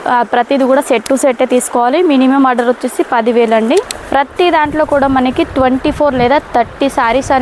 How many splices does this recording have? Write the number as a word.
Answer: one